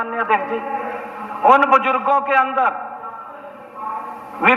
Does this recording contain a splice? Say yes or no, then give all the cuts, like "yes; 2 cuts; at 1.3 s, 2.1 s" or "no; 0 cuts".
no; 0 cuts